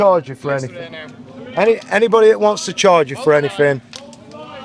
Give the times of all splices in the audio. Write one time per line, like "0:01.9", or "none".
none